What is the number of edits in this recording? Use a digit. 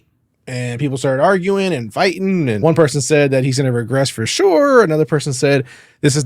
1